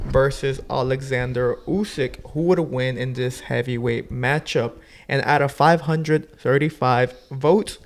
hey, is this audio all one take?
yes; 0 cuts

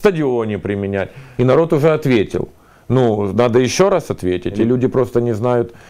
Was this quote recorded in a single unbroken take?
no; 2 cuts; at 1.3 s, 4.6 s

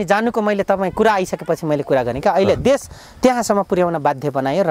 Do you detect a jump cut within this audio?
no; 0 cuts

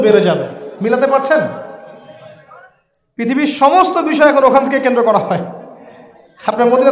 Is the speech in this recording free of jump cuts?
yes; 0 cuts

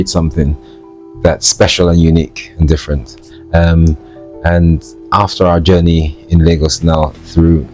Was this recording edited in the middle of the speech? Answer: no; 0 cuts

